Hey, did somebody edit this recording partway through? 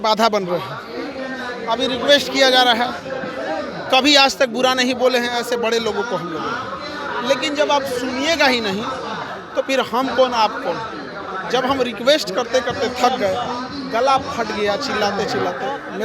no; 0 cuts

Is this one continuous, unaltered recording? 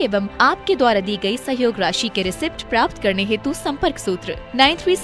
yes; 0 cuts

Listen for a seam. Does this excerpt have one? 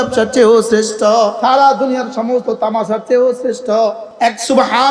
yes; 2 cuts; at 1.4 s, 4.0 s

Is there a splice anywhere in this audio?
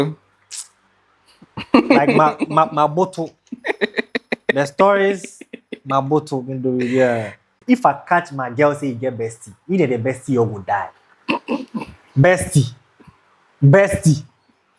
yes; 1 cut; at 7.5 s

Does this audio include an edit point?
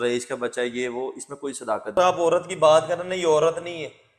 yes; 1 cut; at 1.9 s

